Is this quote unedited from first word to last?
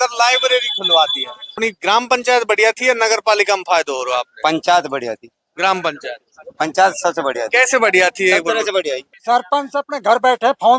no; 2 cuts; at 1.5 s, 9.1 s

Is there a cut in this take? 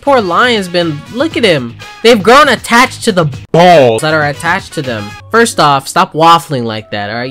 yes; 1 cut; at 5.1 s

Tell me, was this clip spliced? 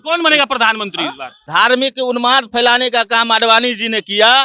yes; 1 cut; at 1.4 s

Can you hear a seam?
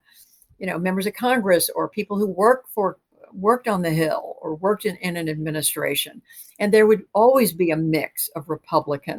no; 0 cuts

